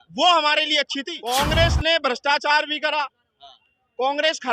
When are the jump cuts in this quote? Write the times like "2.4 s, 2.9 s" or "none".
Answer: 1.1 s